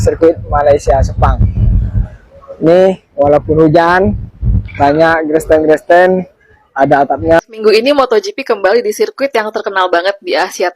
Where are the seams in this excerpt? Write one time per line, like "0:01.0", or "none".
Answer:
0:07.4

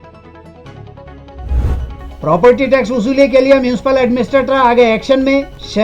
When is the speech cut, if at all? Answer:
0:01.8

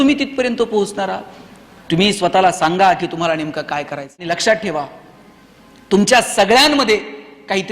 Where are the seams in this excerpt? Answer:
0:04.2

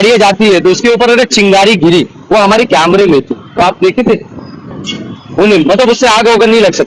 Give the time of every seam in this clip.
none

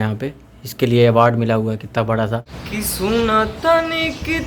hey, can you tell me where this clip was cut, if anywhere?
0:02.6

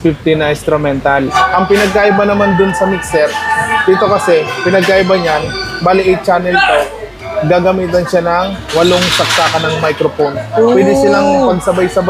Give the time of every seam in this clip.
0:01.3

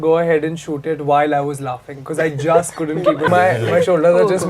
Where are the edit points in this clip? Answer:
0:03.3

